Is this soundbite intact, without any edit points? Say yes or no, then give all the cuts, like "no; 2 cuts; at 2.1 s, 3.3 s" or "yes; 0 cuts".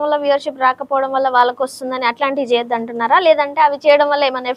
yes; 0 cuts